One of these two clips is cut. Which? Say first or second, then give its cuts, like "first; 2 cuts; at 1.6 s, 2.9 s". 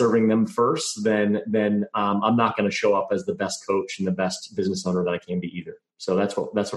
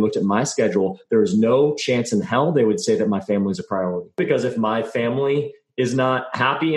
second; 1 cut; at 4.2 s